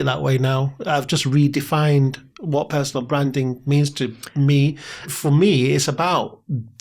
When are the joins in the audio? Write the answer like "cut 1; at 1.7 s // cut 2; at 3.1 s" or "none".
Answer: cut 1; at 5.1 s